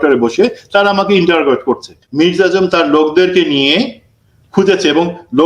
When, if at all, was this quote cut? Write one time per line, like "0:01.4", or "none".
0:02.0